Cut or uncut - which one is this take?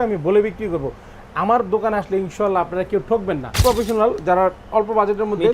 cut